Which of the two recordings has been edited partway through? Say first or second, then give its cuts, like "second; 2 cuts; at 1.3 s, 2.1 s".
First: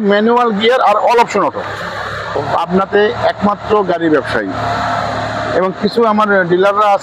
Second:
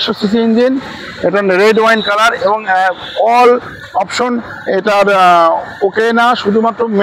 first; 1 cut; at 2.4 s